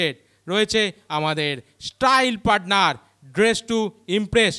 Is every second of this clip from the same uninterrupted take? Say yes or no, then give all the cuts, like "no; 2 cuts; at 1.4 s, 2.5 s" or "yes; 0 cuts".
yes; 0 cuts